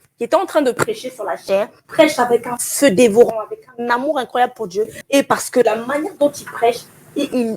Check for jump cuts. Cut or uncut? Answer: cut